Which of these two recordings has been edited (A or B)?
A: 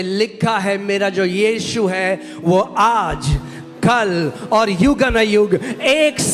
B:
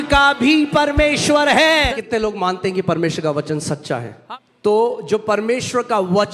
B